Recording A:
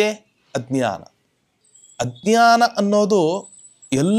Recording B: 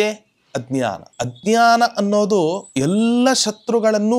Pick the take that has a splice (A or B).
B